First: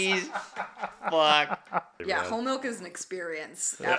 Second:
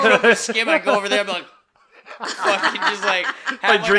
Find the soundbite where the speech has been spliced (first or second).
first